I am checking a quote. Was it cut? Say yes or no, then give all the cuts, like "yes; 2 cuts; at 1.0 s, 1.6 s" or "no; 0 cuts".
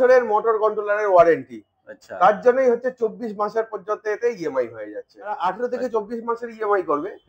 yes; 1 cut; at 5.3 s